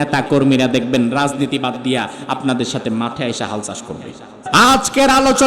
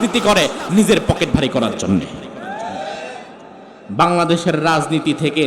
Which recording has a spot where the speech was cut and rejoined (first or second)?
first